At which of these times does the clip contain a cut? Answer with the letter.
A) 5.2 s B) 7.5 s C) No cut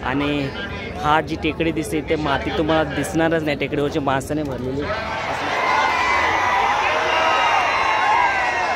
A